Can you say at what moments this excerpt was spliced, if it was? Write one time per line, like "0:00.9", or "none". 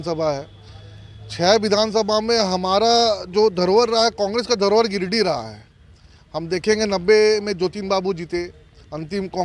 none